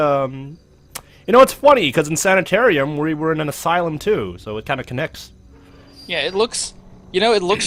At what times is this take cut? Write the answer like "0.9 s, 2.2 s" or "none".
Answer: none